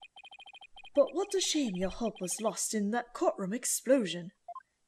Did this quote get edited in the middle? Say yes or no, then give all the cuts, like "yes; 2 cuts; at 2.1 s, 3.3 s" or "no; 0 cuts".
no; 0 cuts